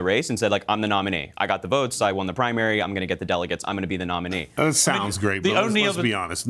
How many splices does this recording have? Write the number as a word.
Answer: one